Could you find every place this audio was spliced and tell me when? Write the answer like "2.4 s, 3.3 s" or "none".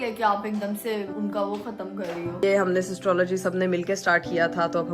1.1 s, 2.4 s